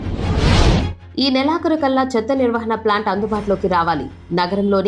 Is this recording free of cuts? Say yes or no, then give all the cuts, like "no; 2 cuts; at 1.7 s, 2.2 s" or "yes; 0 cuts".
no; 1 cut; at 1.0 s